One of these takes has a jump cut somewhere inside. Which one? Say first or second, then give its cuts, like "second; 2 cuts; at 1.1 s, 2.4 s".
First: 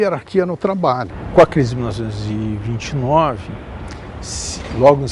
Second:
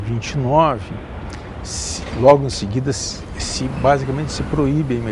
first; 1 cut; at 1.2 s